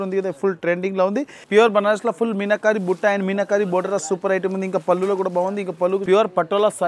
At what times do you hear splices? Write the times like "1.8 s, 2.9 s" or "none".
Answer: 1.4 s, 6.0 s